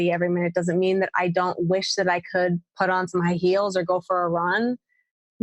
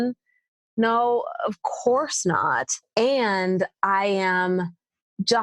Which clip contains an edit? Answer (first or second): second